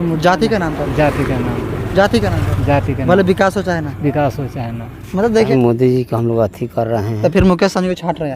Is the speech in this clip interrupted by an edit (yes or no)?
yes